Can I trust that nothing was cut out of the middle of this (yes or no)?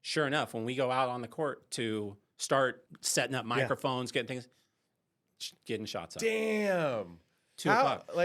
no